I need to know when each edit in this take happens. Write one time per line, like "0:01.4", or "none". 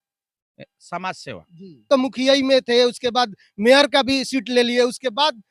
0:01.9